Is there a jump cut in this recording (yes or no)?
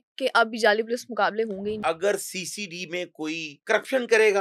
yes